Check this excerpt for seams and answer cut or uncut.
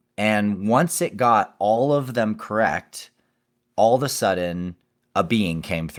uncut